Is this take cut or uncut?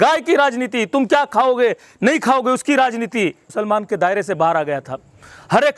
cut